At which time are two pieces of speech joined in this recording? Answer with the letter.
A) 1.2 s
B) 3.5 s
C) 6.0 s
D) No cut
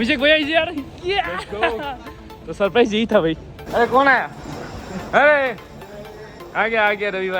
B